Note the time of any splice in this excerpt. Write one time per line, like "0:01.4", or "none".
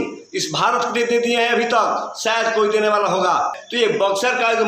0:03.6

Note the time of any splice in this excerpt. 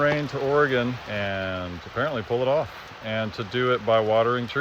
0:01.0

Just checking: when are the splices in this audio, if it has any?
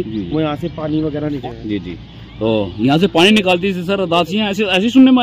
0:01.4

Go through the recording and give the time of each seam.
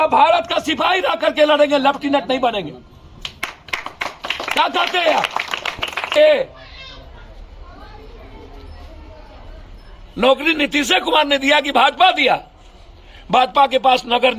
0:06.1

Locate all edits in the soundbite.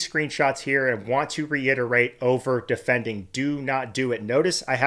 none

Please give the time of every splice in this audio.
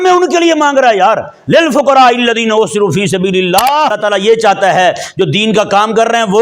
0:04.0

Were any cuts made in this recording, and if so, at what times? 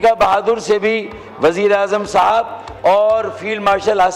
none

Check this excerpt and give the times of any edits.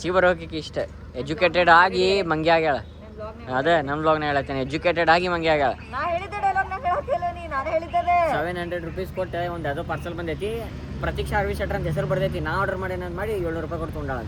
none

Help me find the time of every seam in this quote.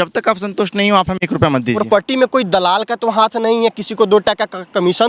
0:01.8

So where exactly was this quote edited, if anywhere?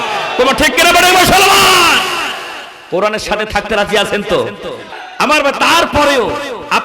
0:04.8

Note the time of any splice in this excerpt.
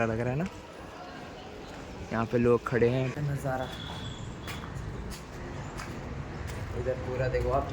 0:03.1

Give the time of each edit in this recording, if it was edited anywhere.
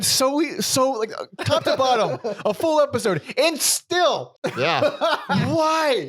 0:04.3

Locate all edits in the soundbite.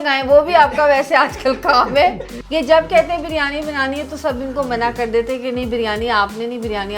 0:02.3

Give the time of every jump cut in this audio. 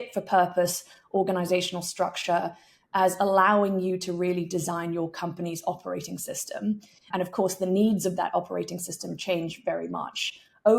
0:07.1

